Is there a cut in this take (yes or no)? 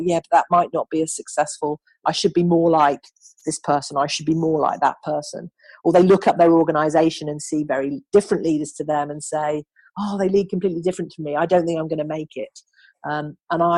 no